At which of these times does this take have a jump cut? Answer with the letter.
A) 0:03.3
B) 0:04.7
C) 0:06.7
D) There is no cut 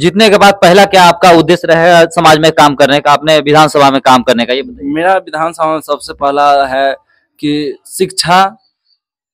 D